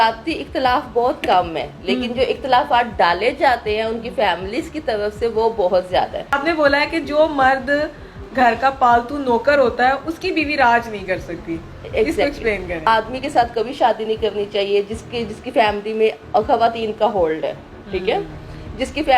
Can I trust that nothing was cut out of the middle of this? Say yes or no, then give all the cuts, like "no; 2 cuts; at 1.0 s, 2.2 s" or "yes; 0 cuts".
no; 2 cuts; at 6.3 s, 12.9 s